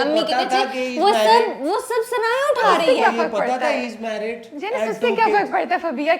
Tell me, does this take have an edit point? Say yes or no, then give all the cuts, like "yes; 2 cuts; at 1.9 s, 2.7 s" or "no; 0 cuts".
no; 0 cuts